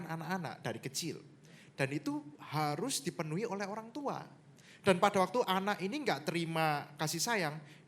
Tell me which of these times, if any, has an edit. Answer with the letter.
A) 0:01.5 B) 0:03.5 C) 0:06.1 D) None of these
D